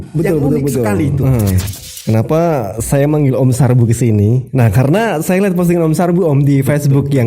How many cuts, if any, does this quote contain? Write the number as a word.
one